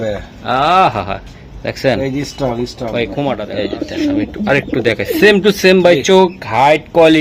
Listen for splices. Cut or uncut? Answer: cut